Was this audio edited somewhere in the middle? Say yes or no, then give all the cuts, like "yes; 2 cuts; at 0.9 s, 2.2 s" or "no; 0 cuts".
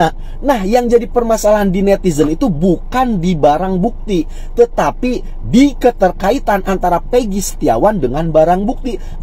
no; 0 cuts